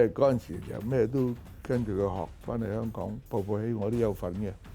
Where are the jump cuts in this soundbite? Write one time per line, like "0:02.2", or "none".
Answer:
none